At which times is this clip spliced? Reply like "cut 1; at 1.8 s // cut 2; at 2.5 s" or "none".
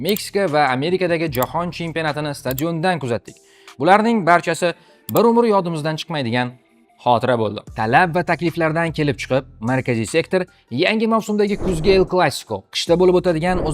none